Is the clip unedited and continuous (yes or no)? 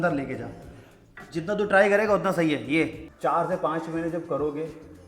no